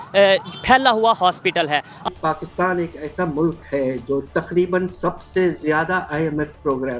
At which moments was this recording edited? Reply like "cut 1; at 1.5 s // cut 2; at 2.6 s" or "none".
cut 1; at 2.1 s

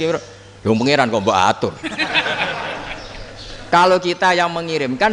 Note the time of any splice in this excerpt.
none

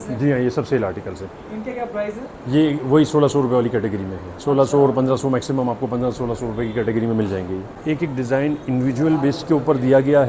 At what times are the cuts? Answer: cut 1; at 7.7 s

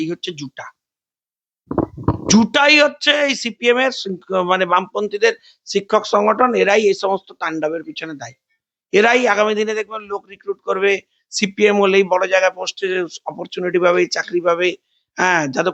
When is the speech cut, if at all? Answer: none

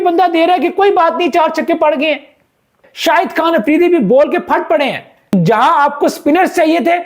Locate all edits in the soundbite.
cut 1; at 2.8 s // cut 2; at 5.3 s

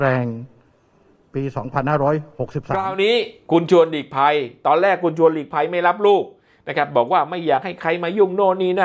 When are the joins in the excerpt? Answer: cut 1; at 2.9 s

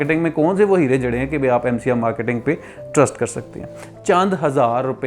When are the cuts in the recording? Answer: cut 1; at 3.7 s

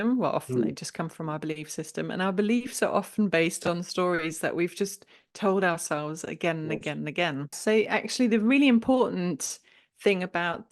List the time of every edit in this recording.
cut 1; at 7.6 s

